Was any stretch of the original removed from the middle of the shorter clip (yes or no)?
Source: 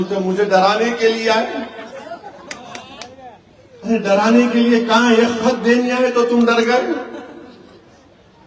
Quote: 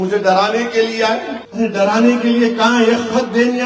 yes